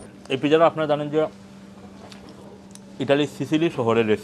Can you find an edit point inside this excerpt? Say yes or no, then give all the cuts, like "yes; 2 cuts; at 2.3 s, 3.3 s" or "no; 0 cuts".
no; 0 cuts